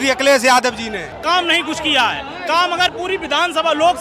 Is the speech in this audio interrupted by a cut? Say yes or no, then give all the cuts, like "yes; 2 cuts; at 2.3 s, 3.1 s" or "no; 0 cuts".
yes; 1 cut; at 1.1 s